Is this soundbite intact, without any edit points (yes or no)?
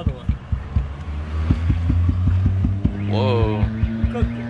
yes